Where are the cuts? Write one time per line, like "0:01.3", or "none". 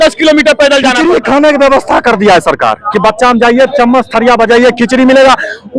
0:01.0